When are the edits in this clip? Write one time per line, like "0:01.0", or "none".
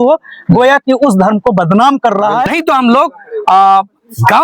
0:02.4